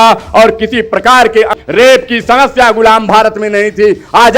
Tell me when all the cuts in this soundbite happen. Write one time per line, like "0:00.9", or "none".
0:01.5